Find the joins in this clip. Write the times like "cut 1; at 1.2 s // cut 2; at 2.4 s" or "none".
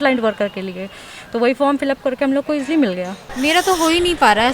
cut 1; at 3.2 s